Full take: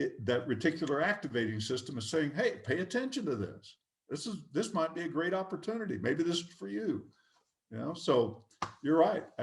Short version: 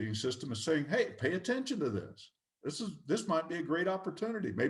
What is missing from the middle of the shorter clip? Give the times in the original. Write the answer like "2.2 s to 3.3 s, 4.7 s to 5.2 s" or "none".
none

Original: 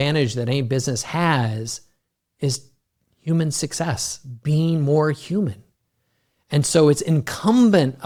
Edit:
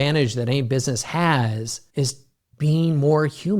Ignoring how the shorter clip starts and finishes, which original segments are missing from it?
2.2 s to 4.1 s

